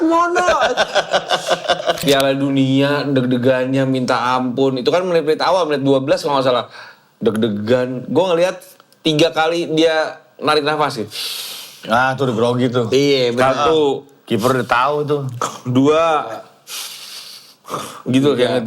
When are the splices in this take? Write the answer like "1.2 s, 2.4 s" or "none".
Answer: 2.0 s